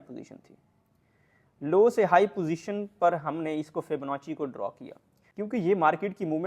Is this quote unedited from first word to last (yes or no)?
yes